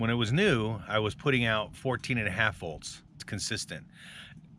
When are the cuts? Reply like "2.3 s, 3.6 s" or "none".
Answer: 3.2 s